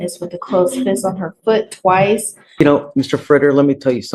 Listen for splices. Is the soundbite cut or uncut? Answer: cut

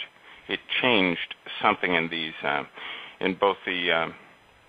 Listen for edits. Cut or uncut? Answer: uncut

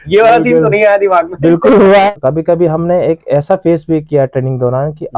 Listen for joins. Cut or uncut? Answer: cut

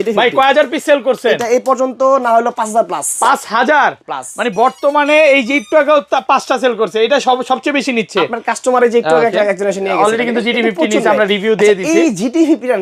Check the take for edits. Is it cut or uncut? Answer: uncut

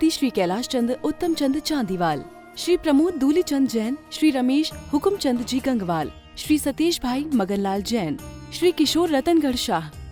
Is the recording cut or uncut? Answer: uncut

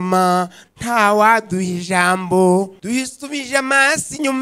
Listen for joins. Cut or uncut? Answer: cut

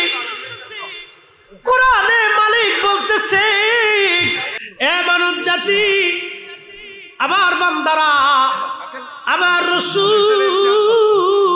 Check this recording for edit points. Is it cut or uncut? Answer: cut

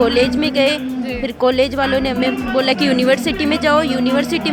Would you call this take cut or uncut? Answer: uncut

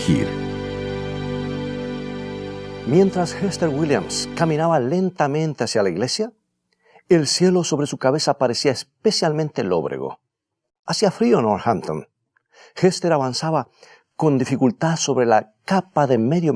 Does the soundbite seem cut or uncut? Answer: uncut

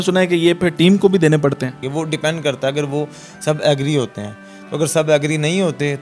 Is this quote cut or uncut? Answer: cut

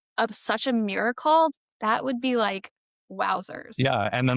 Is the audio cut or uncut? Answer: cut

